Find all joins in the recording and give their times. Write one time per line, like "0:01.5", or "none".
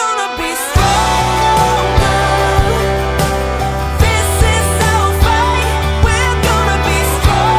none